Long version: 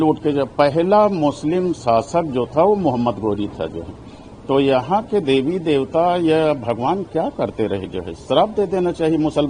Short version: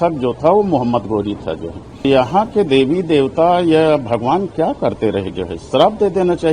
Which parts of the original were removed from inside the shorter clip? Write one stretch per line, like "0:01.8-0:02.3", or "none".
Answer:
0:04.2-0:04.6